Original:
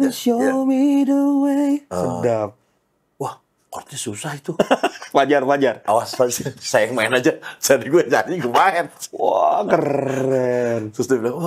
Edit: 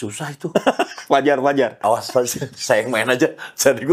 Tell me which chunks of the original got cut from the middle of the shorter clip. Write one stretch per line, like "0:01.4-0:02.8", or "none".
none